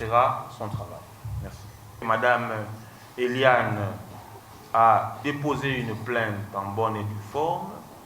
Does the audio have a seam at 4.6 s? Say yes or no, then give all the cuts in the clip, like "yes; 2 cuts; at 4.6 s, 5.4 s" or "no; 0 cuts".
no; 1 cut; at 1.9 s